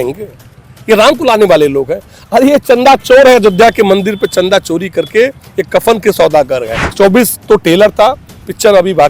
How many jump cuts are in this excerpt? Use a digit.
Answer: 1